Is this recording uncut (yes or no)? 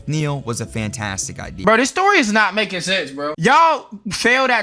no